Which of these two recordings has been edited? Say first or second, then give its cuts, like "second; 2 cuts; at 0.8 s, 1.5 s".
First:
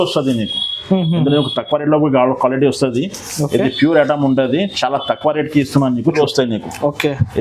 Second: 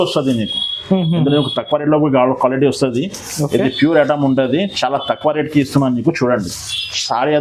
first; 1 cut; at 6.1 s